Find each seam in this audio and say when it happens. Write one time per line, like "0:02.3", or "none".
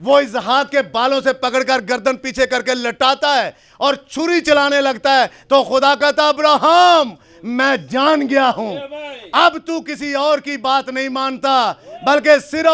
none